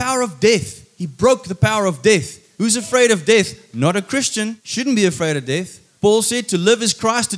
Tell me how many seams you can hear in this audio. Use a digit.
1